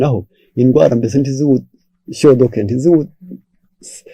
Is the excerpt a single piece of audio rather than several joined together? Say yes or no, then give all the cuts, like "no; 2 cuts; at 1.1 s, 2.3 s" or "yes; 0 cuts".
yes; 0 cuts